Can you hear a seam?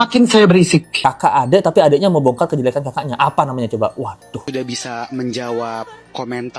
yes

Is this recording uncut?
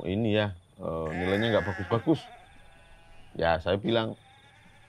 yes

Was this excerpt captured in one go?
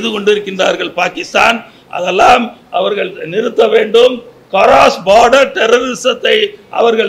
yes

